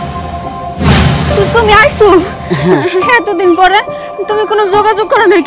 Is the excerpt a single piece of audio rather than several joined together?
yes; 0 cuts

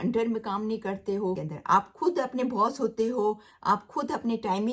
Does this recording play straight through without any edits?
no; 1 cut; at 1.5 s

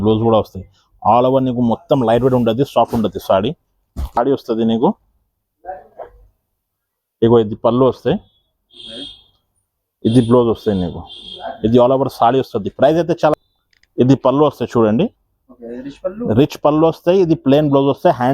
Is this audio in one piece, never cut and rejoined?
no; 2 cuts; at 4.2 s, 13.3 s

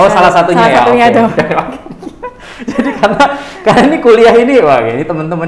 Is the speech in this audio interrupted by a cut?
no; 0 cuts

